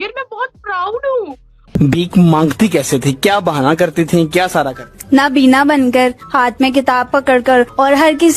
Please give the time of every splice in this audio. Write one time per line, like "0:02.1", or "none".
0:01.6

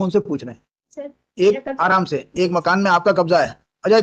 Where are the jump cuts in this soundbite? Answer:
none

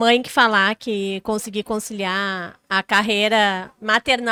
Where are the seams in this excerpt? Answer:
none

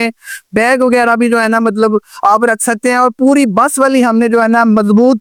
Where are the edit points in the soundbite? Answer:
none

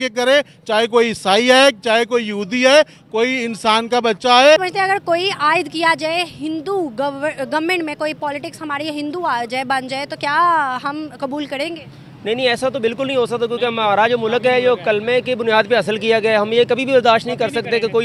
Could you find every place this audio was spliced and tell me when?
none

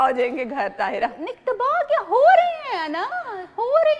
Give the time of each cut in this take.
none

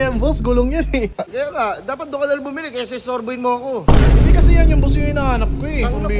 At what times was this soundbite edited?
0:01.3

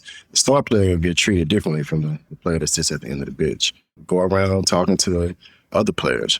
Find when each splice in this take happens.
0:04.0

